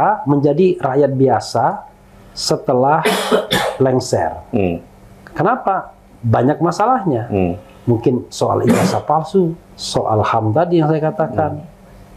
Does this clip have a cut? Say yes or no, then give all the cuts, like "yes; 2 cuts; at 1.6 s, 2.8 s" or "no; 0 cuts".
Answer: no; 0 cuts